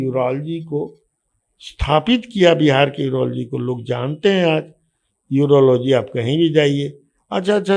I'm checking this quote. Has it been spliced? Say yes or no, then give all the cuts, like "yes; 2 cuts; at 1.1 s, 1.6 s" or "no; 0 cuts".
no; 0 cuts